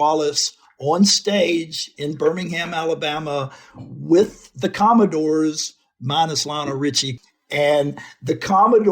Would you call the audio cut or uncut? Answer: cut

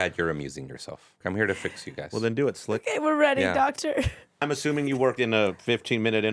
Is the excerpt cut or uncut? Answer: cut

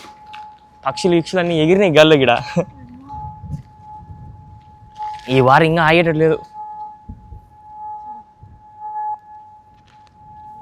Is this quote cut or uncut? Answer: uncut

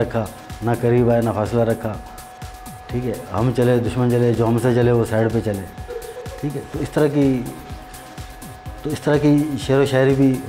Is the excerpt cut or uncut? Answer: uncut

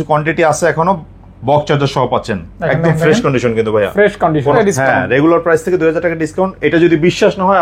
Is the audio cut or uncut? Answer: cut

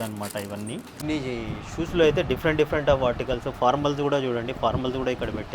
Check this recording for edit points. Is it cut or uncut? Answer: cut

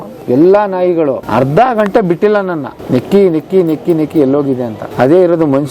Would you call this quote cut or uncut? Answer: cut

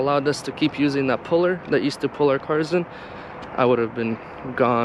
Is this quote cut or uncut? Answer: uncut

